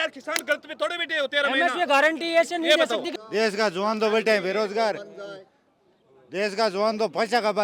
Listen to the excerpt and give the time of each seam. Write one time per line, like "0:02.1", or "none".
0:03.1